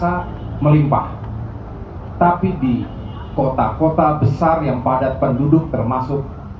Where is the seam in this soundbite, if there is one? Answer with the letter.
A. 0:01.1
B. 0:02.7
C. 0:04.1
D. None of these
D